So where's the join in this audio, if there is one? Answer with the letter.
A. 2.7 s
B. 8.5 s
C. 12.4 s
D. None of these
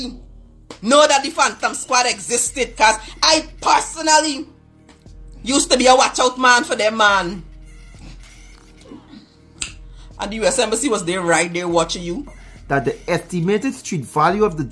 C